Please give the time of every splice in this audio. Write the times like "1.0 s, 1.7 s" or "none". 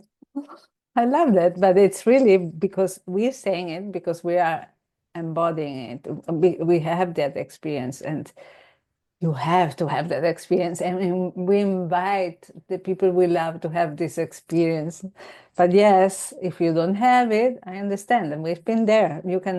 none